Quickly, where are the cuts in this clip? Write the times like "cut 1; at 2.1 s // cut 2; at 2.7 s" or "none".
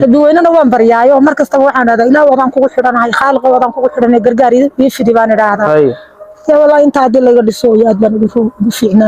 none